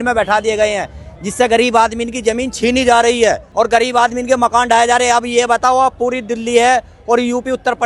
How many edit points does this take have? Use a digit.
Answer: 1